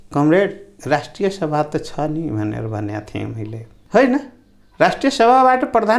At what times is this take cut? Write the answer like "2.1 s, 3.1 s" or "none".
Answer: 3.7 s